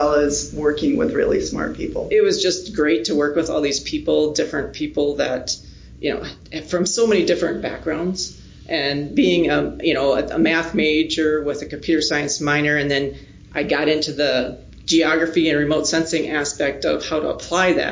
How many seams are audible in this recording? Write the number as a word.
one